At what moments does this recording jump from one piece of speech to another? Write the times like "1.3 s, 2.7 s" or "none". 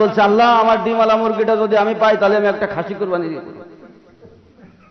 none